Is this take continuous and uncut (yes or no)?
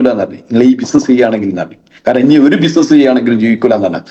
yes